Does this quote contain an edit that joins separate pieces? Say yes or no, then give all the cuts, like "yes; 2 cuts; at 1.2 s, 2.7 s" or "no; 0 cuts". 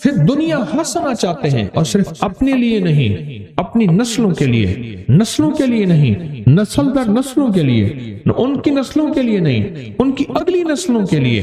no; 0 cuts